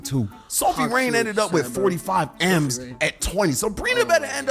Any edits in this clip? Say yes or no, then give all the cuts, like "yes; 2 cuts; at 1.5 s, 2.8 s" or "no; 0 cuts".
no; 0 cuts